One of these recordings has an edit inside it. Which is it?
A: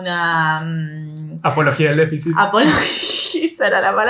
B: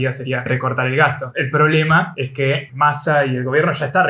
B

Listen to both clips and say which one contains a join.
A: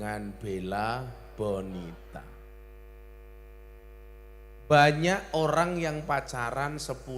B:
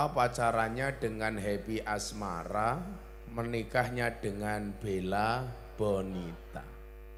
A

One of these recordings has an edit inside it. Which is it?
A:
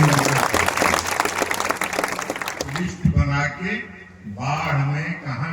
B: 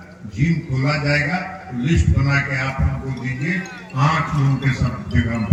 A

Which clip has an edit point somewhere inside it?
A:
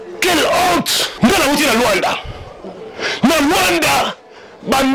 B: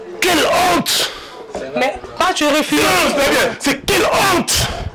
A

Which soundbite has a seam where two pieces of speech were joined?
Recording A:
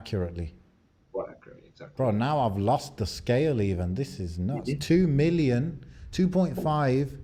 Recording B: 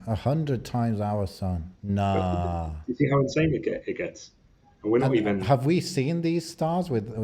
B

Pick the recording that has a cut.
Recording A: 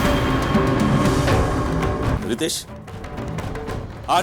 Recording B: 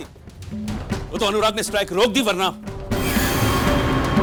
A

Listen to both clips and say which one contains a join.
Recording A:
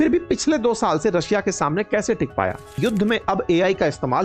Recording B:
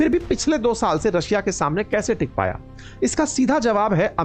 A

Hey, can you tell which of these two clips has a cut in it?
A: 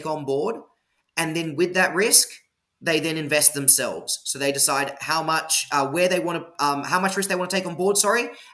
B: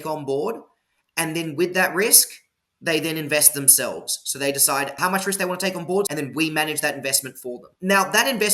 B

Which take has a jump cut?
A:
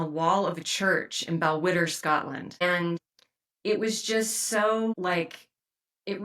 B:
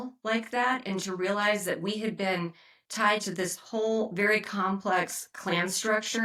A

